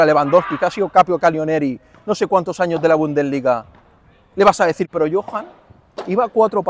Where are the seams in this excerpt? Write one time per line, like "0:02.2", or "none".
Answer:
0:04.9

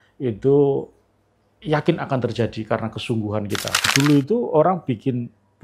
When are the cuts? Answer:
0:03.8

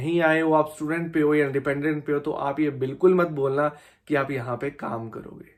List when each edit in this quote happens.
none

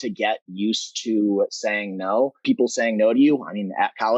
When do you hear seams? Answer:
0:02.4

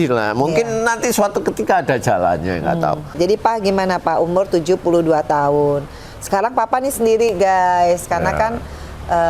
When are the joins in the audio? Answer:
0:03.1

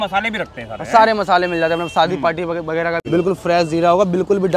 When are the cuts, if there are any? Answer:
0:03.0

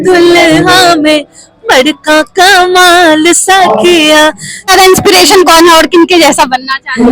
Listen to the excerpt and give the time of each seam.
0:04.7

